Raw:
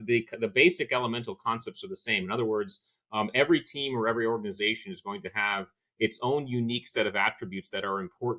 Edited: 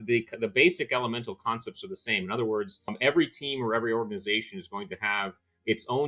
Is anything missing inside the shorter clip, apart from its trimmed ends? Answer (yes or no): yes